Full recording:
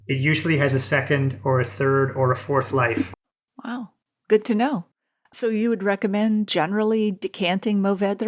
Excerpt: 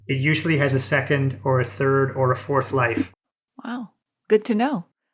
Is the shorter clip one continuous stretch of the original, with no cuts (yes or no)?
yes